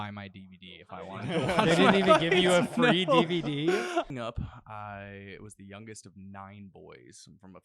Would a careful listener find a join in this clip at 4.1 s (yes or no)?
yes